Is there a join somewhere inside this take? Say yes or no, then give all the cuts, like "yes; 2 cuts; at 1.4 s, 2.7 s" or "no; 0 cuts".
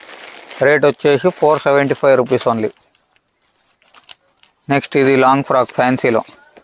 no; 0 cuts